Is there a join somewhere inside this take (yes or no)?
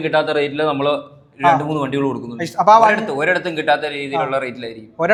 no